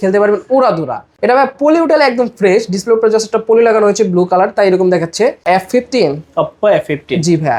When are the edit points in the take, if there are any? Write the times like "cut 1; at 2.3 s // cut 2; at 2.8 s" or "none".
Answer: cut 1; at 1.1 s // cut 2; at 5.4 s